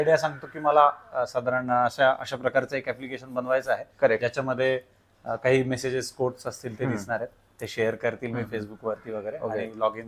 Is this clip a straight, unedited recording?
yes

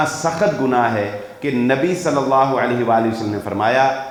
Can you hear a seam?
no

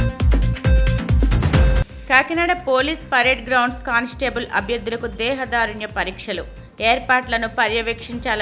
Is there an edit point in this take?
yes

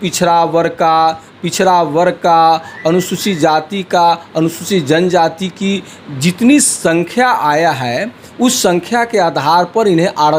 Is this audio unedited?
yes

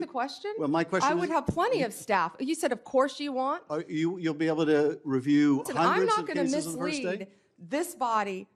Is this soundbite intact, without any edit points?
yes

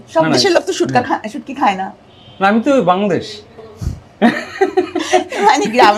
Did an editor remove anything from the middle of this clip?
no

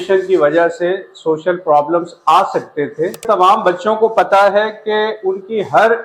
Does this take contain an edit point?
yes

